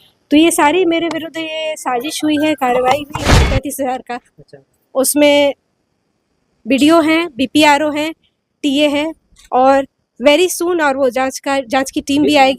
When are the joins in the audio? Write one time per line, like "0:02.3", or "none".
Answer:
0:03.4